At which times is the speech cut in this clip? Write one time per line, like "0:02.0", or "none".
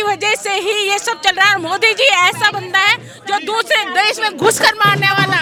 none